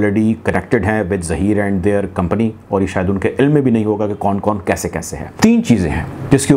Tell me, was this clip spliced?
yes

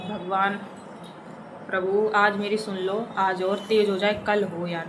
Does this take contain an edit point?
no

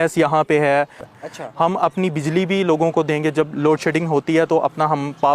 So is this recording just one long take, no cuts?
no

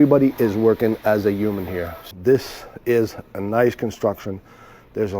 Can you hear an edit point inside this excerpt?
yes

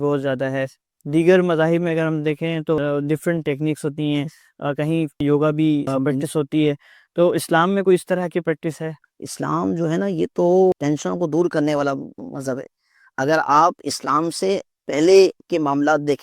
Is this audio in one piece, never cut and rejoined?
no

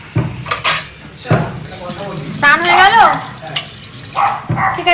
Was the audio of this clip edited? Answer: no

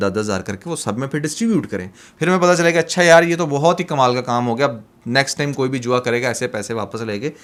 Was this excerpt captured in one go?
yes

